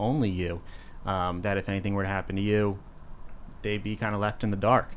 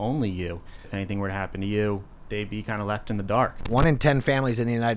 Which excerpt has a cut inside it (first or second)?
second